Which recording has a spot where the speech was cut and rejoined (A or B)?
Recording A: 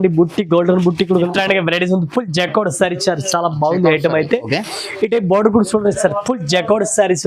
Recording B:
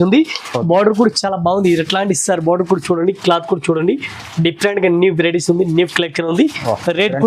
A